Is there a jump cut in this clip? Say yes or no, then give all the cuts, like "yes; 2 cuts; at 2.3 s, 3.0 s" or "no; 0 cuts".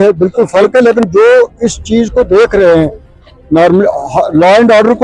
no; 0 cuts